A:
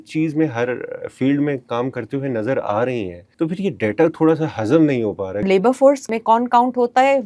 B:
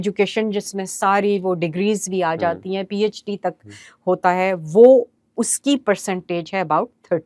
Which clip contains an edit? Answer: A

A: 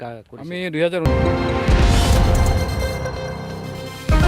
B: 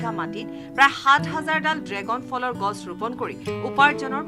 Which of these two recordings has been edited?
A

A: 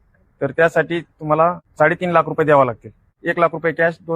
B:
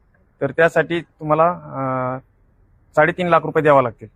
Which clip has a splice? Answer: A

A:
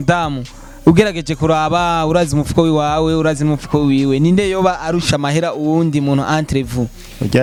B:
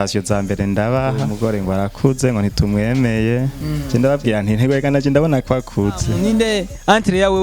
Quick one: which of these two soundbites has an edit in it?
B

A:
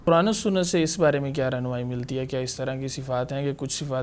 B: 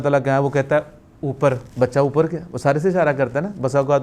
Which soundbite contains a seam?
B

